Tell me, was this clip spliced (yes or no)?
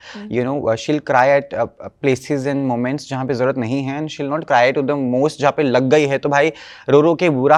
no